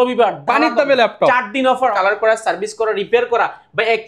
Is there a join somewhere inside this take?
yes; 1 cut; at 1.9 s

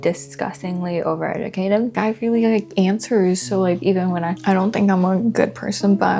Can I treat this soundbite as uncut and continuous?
no; 2 cuts; at 1.9 s, 4.4 s

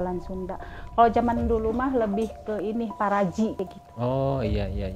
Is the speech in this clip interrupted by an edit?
yes; 1 cut; at 3.6 s

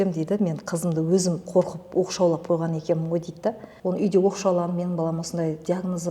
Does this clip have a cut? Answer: yes; 1 cut; at 3.7 s

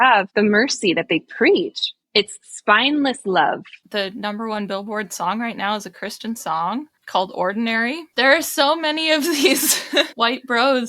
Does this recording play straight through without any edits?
no; 2 cuts; at 3.8 s, 8.1 s

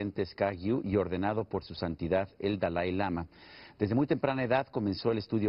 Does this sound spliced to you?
yes; 1 cut; at 3.4 s

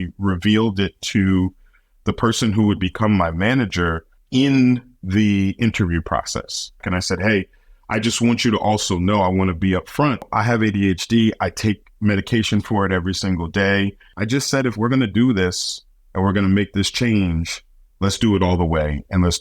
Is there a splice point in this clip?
yes; 4 cuts; at 4.1 s, 6.8 s, 10.3 s, 14.1 s

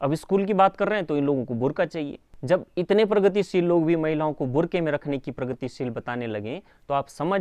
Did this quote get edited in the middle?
no; 0 cuts

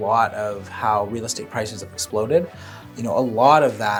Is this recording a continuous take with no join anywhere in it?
yes; 0 cuts

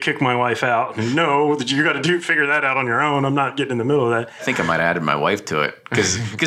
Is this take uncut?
no; 1 cut; at 4.4 s

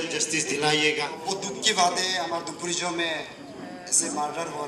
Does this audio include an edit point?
yes; 1 cut; at 1.2 s

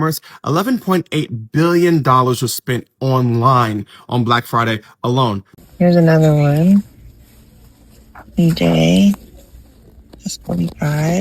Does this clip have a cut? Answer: yes; 1 cut; at 5.5 s

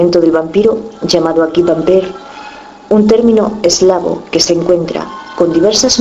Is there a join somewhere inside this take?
no; 0 cuts

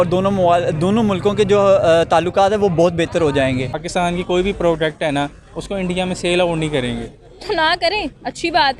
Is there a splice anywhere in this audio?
yes; 1 cut; at 3.8 s

